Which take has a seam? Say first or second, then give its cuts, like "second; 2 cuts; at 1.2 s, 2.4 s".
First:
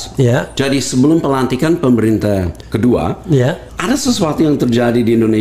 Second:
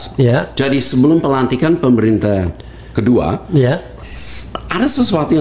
first; 2 cuts; at 2.6 s, 3.7 s